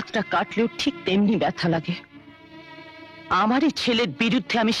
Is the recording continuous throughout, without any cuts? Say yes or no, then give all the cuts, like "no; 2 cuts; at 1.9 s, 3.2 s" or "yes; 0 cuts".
yes; 0 cuts